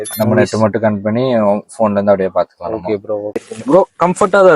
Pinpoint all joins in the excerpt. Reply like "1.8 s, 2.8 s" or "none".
3.5 s